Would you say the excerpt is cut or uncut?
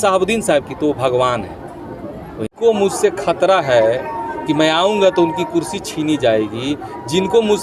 uncut